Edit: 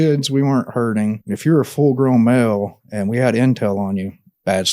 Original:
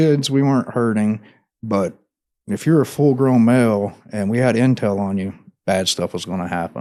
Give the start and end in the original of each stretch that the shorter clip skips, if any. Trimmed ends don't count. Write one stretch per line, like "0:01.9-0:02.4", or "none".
0:01.3-0:02.5